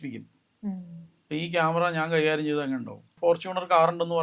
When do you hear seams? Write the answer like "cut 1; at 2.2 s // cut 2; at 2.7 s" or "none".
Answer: cut 1; at 3.1 s